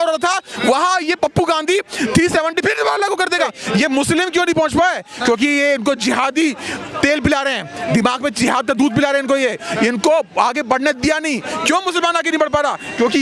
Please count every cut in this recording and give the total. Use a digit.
1